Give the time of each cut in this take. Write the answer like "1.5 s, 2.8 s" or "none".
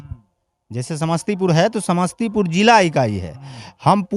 none

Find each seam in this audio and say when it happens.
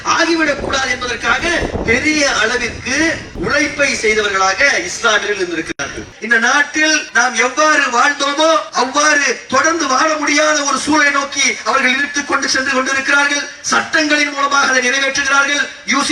3.3 s, 6.1 s, 7.1 s, 8.7 s

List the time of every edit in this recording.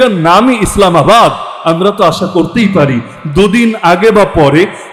none

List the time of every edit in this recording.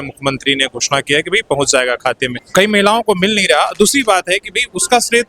2.4 s

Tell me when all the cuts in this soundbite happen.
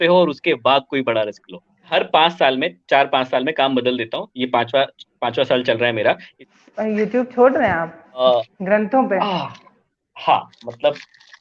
1.9 s, 6.3 s, 8.2 s

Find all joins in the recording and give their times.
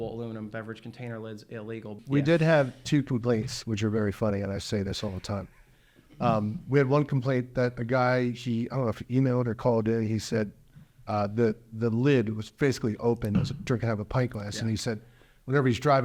2.0 s

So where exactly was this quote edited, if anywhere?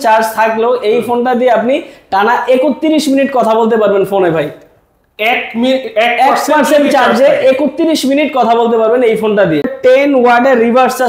9.7 s

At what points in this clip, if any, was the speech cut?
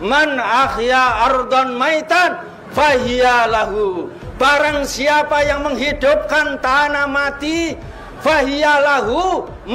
none

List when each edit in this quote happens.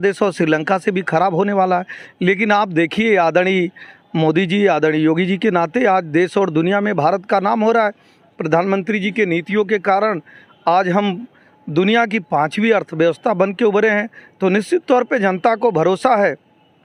none

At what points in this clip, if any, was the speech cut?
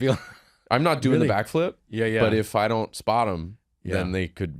none

